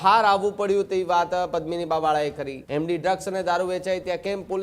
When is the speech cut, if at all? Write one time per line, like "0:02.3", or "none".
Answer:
0:02.5